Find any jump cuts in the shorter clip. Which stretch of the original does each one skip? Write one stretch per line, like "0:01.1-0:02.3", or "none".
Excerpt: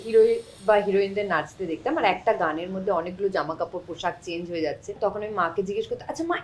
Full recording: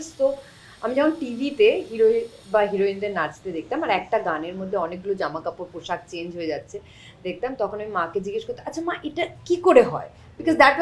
0:06.8-0:07.5